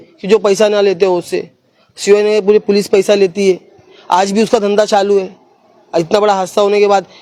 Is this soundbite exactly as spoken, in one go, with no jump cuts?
yes; 0 cuts

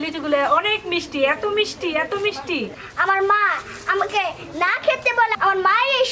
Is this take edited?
yes; 1 cut; at 2.7 s

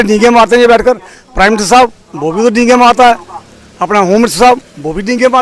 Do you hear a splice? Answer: no; 0 cuts

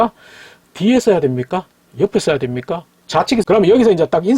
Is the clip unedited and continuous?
no; 1 cut; at 3.4 s

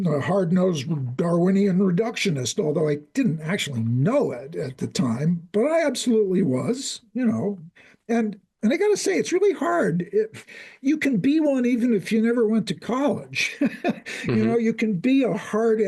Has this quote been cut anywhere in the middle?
no; 0 cuts

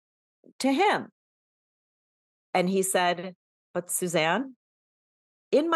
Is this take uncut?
yes; 0 cuts

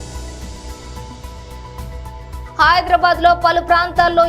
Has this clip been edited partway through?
yes; 1 cut; at 1.5 s

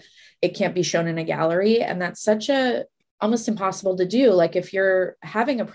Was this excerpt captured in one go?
no; 1 cut; at 2.9 s

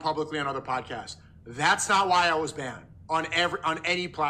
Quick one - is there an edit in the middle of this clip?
no; 0 cuts

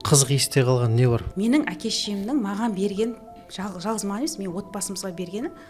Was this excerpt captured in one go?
no; 1 cut; at 1.3 s

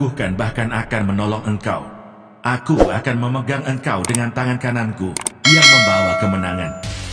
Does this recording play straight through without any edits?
yes; 0 cuts

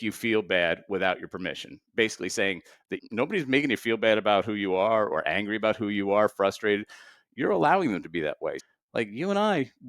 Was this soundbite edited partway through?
yes; 2 cuts; at 3.0 s, 8.6 s

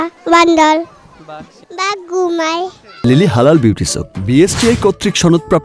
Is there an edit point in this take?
no; 0 cuts

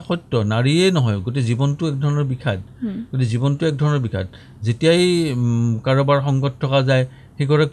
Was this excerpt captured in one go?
yes; 0 cuts

